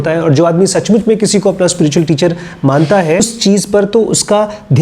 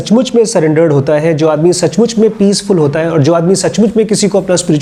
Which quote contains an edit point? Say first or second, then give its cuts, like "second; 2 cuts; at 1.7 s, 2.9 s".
first; 1 cut; at 3.2 s